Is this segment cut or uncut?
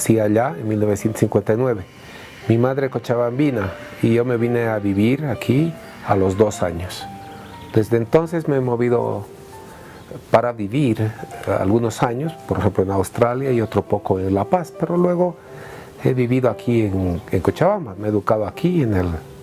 cut